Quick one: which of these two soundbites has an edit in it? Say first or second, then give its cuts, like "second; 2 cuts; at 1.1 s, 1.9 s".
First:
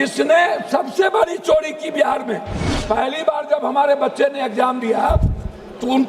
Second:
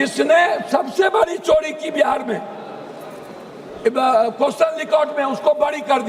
first; 1 cut; at 2.7 s